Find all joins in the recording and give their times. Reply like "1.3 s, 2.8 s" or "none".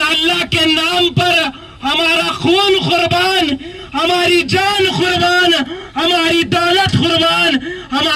none